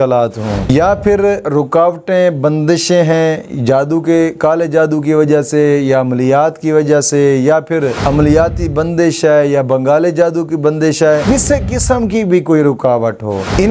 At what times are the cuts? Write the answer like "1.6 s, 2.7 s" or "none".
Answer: none